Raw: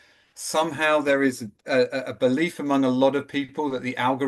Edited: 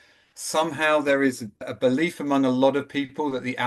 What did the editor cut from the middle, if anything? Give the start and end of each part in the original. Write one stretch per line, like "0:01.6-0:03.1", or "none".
0:01.6-0:02.0